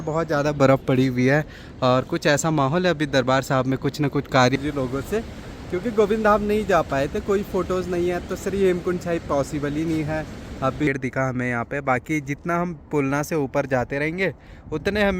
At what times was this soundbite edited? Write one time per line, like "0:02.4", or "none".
0:04.6
0:10.9